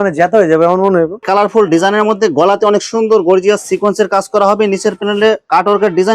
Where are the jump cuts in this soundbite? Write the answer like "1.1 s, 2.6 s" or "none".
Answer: 1.2 s